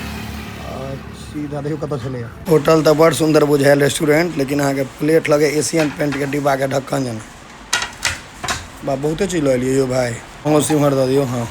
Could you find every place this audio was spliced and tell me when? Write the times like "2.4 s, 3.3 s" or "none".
2.4 s, 10.3 s